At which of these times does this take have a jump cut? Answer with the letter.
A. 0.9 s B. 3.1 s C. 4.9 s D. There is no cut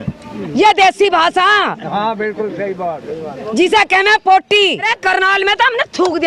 C